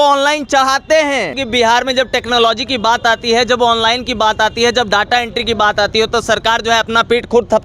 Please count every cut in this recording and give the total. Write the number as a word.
one